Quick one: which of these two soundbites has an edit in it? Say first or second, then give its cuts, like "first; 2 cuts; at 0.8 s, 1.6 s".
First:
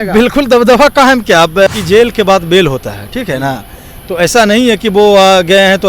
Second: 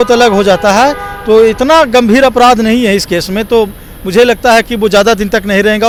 first; 1 cut; at 1.7 s